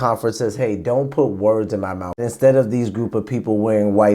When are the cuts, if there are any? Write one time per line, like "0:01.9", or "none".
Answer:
0:02.2